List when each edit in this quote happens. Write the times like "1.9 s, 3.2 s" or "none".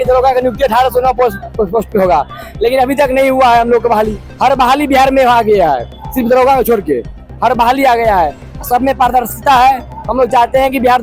none

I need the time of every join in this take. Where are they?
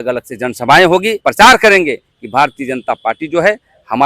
1.2 s

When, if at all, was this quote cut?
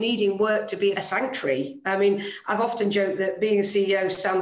1.0 s

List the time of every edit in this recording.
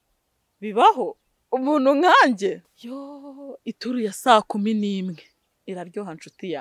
2.6 s

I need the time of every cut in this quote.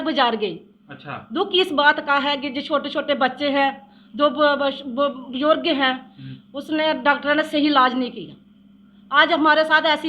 none

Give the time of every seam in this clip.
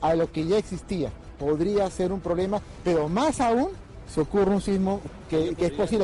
1.3 s, 5.1 s

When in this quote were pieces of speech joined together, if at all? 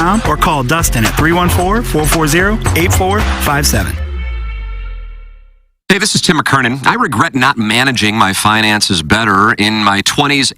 5.6 s

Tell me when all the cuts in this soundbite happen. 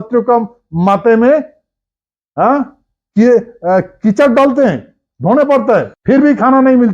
5.9 s

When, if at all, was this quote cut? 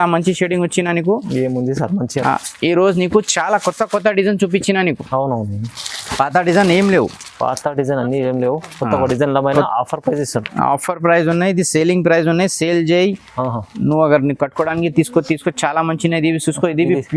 none

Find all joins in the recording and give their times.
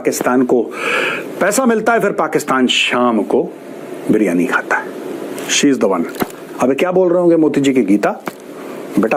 none

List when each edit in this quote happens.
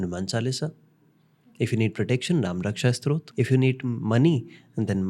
3.3 s

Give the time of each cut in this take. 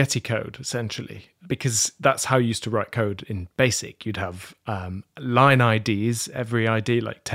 none

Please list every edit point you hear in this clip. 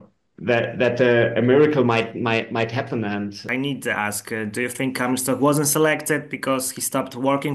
3.4 s

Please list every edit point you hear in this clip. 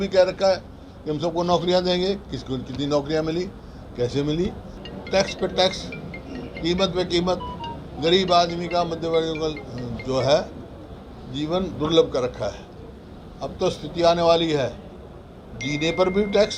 4.7 s

